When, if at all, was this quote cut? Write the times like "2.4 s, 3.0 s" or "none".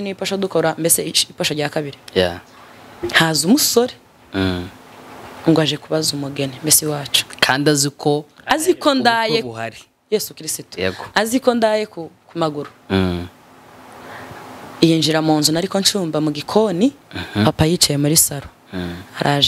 none